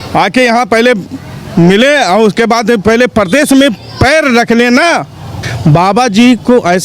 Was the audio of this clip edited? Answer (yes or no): yes